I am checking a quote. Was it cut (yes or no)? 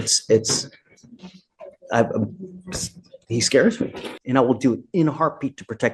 yes